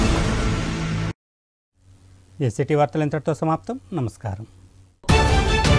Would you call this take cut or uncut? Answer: uncut